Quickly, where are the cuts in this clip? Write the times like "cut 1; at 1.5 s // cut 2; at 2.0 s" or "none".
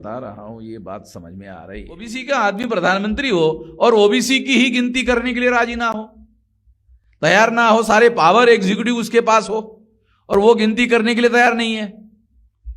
cut 1; at 2.1 s